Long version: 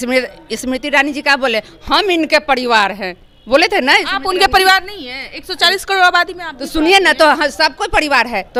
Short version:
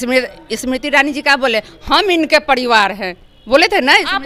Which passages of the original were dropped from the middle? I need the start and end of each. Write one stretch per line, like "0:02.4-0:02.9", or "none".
none